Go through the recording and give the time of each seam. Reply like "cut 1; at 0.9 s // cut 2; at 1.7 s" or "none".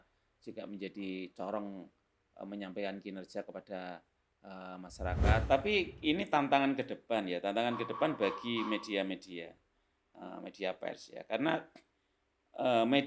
cut 1; at 5.4 s